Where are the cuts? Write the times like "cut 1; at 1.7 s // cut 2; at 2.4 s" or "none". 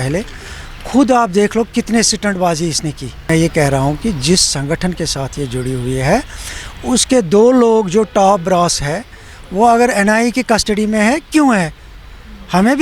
cut 1; at 3.3 s